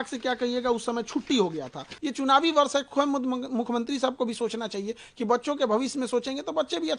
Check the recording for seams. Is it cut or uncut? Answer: cut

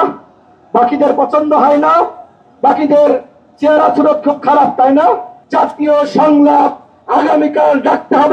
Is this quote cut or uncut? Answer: cut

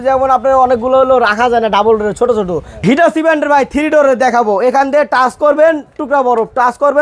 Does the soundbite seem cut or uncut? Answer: cut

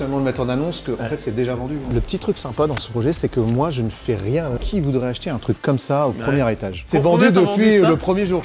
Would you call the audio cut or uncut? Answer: cut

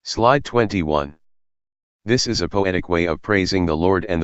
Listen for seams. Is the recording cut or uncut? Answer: cut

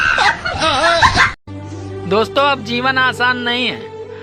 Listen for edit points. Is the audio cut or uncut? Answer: cut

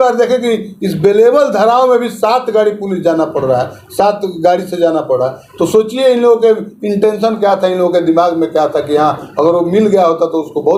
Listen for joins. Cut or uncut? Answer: uncut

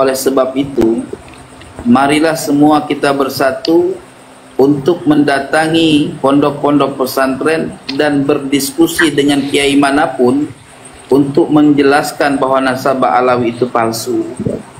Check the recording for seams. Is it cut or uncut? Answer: uncut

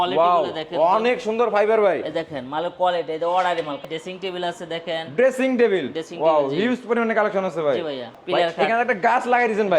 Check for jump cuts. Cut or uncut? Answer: cut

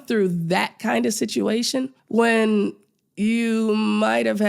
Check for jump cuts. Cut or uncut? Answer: cut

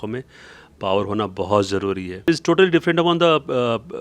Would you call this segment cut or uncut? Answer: cut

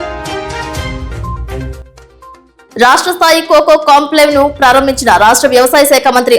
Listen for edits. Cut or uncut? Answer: cut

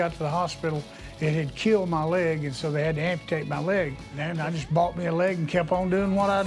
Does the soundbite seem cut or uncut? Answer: cut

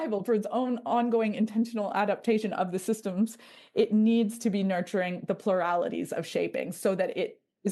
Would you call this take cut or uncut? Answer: uncut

